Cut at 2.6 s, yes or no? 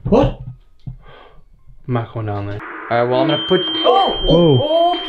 yes